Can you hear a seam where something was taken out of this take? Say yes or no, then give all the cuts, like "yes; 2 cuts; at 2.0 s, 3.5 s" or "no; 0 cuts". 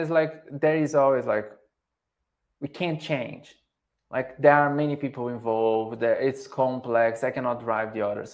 no; 0 cuts